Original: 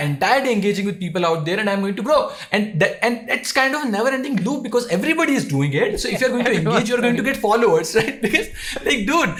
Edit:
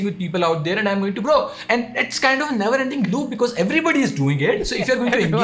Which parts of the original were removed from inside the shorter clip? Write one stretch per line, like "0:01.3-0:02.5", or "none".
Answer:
0:02.4-0:03.0